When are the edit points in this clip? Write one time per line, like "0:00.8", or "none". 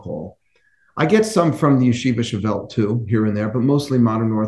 none